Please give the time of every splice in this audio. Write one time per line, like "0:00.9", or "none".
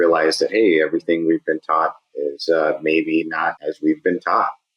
0:03.6